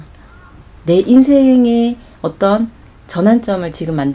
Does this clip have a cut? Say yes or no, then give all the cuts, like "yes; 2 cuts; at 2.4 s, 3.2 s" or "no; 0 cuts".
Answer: no; 0 cuts